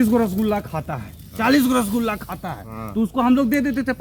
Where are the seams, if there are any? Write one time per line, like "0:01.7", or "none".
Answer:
none